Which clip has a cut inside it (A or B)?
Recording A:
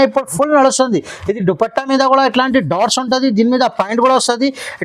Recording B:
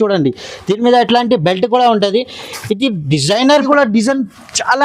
B